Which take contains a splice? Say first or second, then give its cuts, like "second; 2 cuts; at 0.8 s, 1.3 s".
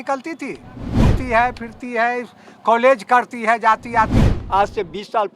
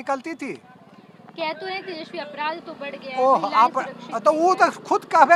first; 2 cuts; at 1.1 s, 4.2 s